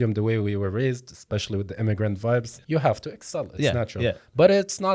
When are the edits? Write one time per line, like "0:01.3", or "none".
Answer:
0:02.5